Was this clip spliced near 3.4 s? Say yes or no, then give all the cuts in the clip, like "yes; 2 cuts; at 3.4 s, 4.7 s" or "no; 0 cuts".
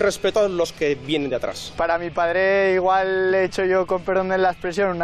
no; 1 cut; at 1.7 s